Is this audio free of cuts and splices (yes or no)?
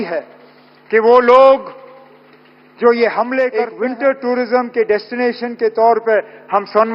no